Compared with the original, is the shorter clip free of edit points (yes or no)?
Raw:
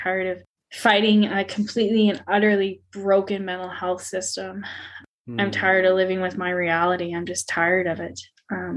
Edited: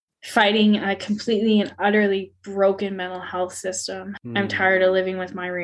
no